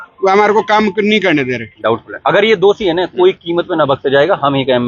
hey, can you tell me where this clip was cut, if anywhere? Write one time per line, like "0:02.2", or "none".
0:01.6